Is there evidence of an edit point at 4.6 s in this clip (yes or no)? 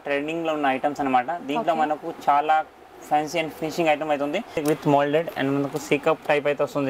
yes